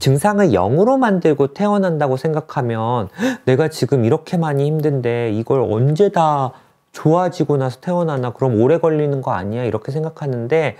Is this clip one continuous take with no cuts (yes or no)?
yes